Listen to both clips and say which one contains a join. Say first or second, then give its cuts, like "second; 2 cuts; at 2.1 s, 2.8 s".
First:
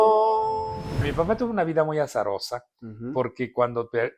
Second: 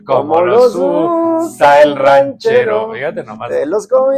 first; 1 cut; at 1.0 s